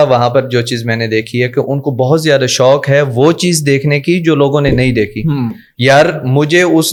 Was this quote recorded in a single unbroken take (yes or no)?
yes